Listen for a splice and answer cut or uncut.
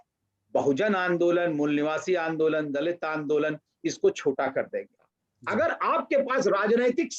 cut